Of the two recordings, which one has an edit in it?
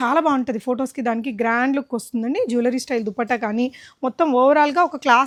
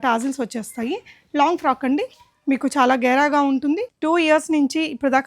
second; 1 cut; at 3.9 s

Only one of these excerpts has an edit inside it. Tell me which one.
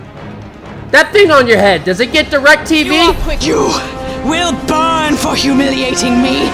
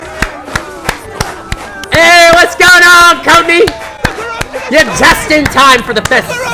first; 1 cut; at 3.4 s

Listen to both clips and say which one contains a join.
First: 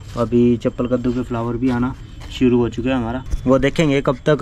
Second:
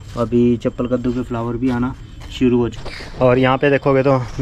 second; 1 cut; at 2.8 s

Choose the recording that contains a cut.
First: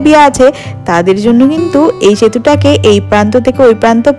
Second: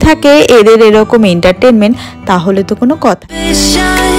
second; 1 cut; at 3.3 s

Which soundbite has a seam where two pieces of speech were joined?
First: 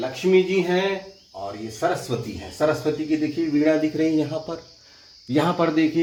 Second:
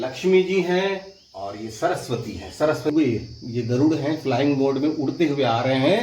second; 1 cut; at 2.9 s

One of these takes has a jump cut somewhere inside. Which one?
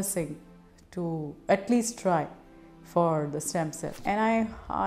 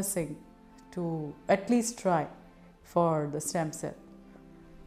first; 1 cut; at 4.0 s

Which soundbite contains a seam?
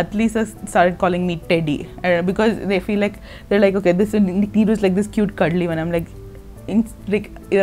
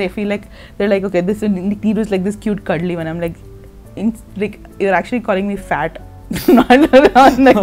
first; 1 cut; at 1.4 s

